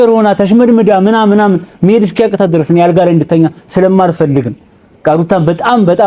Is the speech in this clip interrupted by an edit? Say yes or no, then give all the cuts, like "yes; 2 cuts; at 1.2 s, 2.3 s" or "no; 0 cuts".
no; 0 cuts